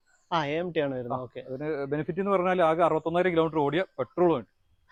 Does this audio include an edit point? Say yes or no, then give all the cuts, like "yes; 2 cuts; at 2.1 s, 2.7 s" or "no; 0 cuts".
no; 0 cuts